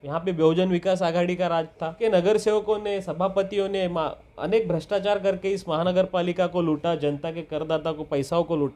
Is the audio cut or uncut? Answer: cut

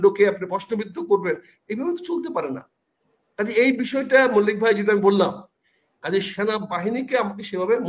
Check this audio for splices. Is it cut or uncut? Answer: uncut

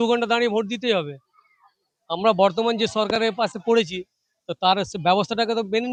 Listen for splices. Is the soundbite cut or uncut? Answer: uncut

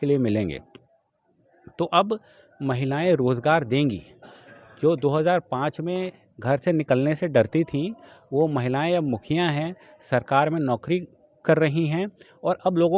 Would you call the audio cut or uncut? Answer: uncut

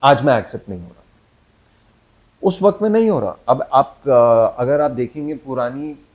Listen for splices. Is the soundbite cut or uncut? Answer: uncut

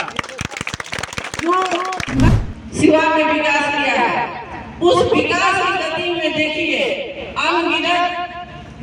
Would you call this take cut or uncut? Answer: cut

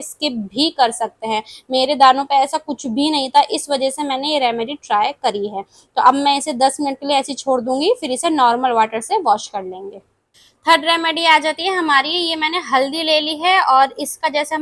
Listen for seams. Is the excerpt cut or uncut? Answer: uncut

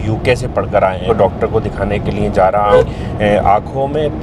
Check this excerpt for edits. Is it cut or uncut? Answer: cut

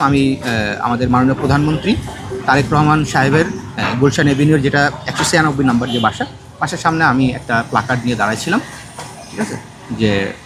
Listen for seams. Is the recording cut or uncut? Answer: uncut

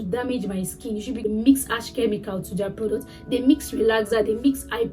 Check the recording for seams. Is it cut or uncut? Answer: cut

